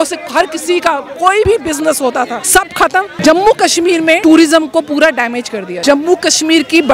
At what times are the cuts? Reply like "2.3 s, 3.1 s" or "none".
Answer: 1.5 s, 2.6 s, 4.2 s, 5.7 s